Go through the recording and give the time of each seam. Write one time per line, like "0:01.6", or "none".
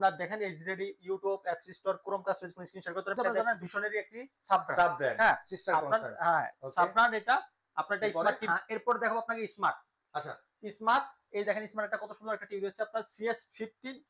0:03.3
0:08.4